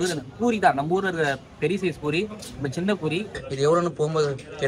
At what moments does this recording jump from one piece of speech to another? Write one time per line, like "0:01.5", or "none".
0:03.4